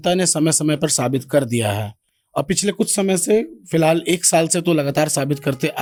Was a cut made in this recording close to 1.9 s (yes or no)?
no